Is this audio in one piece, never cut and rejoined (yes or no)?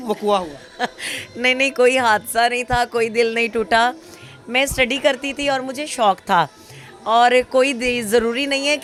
yes